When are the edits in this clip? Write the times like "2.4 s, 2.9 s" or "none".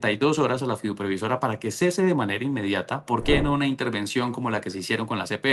3.1 s